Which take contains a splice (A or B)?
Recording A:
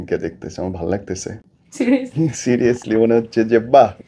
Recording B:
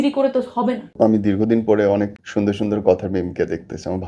B